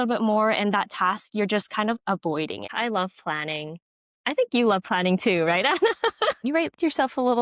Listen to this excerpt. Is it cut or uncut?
cut